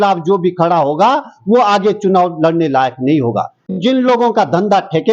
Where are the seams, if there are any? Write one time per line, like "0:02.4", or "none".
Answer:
0:03.7